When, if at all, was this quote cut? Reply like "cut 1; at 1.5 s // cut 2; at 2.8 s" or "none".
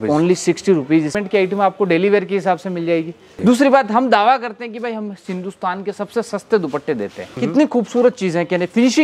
cut 1; at 1.1 s // cut 2; at 3.3 s // cut 3; at 7.2 s